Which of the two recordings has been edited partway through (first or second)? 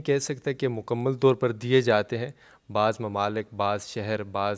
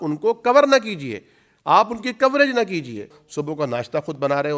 second